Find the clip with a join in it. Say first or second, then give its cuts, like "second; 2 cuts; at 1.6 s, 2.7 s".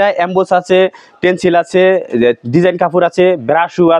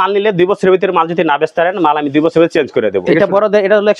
second; 1 cut; at 3.0 s